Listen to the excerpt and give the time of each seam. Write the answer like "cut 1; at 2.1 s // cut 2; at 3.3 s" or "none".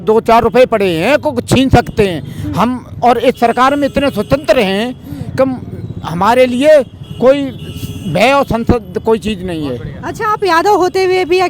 none